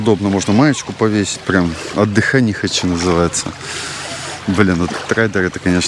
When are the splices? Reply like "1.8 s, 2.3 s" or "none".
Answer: none